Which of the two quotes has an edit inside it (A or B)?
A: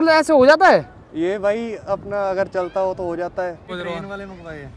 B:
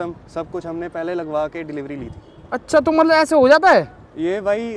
A